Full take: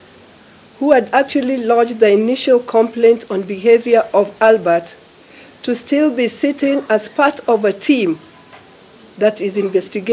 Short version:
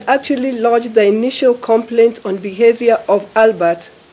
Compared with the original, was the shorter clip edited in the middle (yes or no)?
no